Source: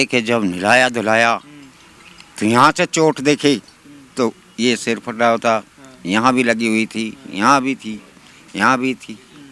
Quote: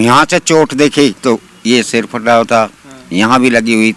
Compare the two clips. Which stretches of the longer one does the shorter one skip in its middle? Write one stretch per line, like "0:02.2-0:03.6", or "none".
0:03.6-0:04.1